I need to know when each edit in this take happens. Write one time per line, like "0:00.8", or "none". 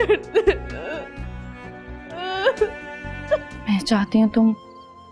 0:03.5